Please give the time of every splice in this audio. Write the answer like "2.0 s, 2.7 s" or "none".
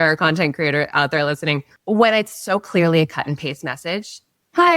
1.7 s